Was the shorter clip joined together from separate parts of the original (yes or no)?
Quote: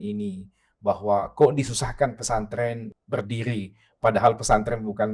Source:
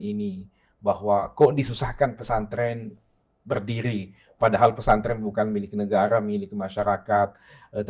yes